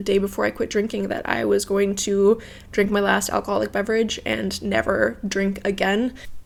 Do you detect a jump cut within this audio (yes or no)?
no